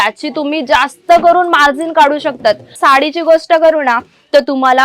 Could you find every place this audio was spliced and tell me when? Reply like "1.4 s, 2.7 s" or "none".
2.8 s